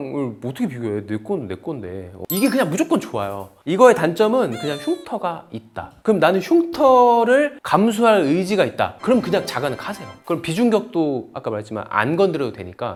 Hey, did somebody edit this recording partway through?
no; 0 cuts

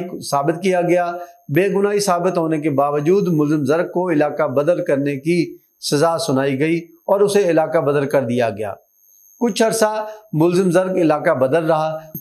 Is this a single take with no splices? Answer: yes; 0 cuts

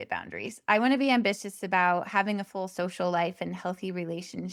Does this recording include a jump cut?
no; 0 cuts

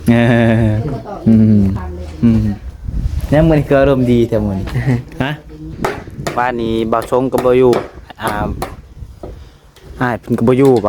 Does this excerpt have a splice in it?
yes; 1 cut; at 5.7 s

